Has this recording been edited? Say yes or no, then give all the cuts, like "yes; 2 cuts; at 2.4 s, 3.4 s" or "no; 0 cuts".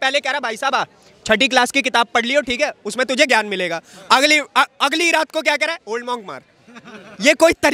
no; 0 cuts